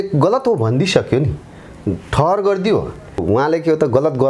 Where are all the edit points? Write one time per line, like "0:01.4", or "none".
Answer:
0:03.2